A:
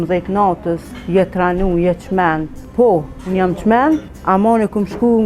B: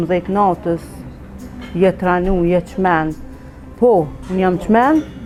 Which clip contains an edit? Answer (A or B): A